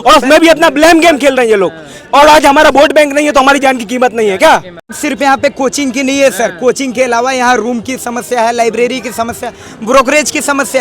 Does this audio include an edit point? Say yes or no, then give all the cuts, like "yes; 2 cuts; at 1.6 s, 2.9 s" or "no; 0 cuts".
yes; 1 cut; at 5.0 s